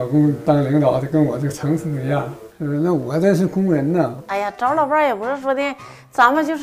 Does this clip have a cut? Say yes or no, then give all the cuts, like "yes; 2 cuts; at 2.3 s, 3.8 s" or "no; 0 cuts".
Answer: yes; 1 cut; at 4.2 s